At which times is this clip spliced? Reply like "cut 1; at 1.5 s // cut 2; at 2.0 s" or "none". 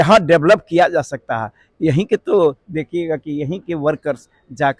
none